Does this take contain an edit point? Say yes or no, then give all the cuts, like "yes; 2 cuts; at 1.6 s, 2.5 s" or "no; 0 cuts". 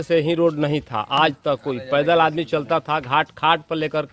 no; 0 cuts